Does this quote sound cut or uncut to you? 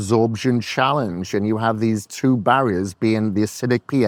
uncut